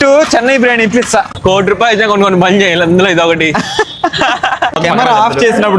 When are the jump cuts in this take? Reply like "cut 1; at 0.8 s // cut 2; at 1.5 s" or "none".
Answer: cut 1; at 1.3 s // cut 2; at 4.8 s